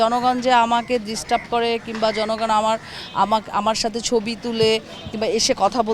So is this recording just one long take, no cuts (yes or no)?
yes